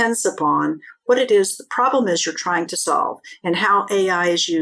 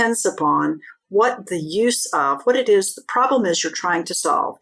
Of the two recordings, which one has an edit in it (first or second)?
first